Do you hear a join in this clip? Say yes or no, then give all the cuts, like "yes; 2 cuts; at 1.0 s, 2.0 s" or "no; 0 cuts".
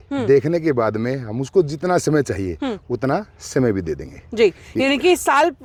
no; 0 cuts